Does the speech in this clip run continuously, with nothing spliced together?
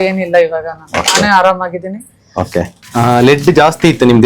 no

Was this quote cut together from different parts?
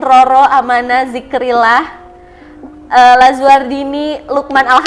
no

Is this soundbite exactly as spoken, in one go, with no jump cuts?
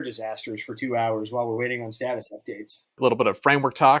no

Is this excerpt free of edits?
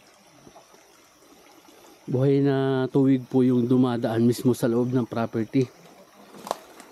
yes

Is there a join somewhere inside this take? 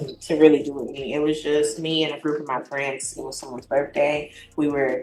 no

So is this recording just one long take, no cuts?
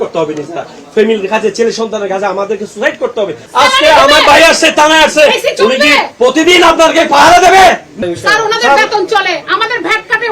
no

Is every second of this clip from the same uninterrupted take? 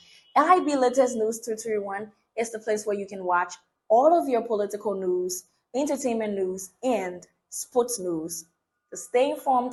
yes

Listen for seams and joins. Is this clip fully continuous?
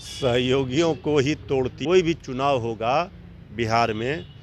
no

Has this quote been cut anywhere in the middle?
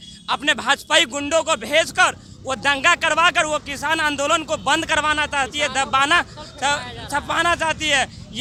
no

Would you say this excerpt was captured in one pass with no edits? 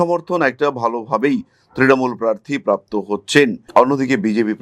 yes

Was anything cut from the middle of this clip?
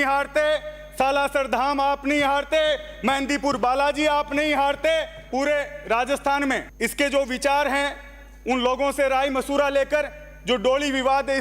yes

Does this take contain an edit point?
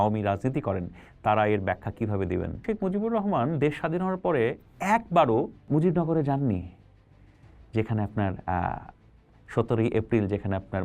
yes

